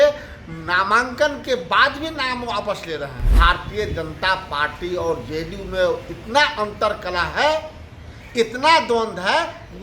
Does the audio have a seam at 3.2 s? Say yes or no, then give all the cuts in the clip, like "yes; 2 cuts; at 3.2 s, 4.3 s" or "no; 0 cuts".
yes; 1 cut; at 3.2 s